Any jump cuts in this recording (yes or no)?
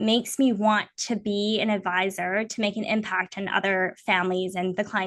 no